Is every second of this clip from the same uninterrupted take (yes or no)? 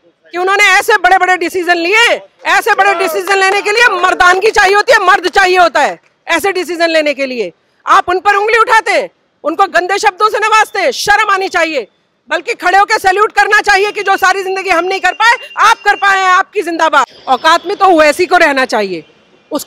no